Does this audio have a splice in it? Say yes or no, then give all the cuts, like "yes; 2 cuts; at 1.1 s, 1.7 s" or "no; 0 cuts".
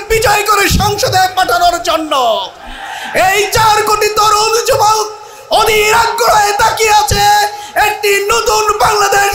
no; 0 cuts